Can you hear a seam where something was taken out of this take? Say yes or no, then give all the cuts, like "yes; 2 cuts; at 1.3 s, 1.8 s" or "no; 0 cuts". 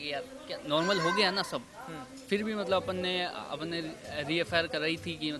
no; 0 cuts